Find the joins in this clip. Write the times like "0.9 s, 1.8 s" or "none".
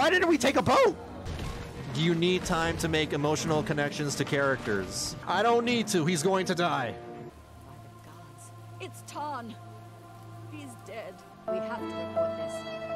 5.1 s, 7.3 s, 11.3 s